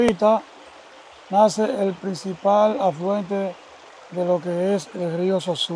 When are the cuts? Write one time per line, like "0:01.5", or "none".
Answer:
0:02.0